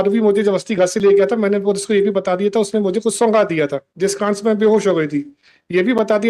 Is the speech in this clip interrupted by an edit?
no; 0 cuts

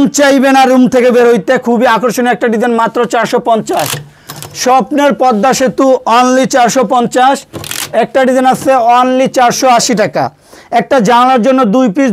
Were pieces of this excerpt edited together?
no; 0 cuts

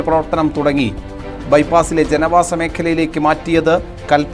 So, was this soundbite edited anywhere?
no; 0 cuts

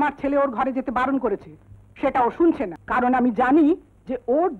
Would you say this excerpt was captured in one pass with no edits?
no; 1 cut; at 2.8 s

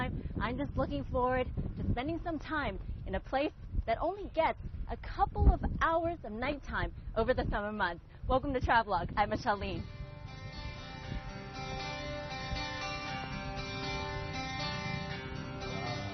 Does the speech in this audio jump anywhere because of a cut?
yes; 1 cut; at 5.7 s

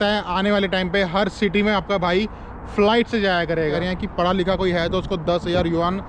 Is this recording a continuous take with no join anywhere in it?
no; 1 cut; at 3.8 s

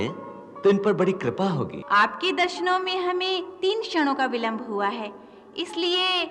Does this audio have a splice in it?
yes; 1 cut; at 1.8 s

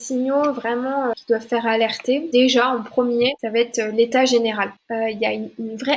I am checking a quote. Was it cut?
yes; 4 cuts; at 1.1 s, 2.3 s, 3.4 s, 4.8 s

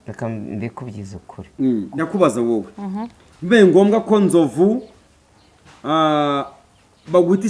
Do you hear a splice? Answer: yes; 1 cut; at 1.9 s

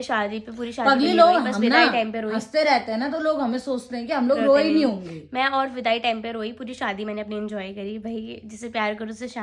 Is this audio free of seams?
yes; 0 cuts

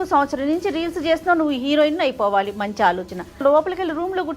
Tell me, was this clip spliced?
yes; 1 cut; at 3.4 s

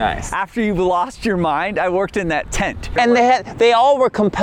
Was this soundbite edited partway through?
yes; 1 cut; at 2.9 s

